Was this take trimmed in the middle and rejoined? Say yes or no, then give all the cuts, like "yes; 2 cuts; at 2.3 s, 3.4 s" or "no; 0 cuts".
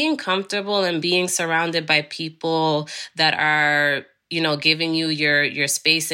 yes; 1 cut; at 1.0 s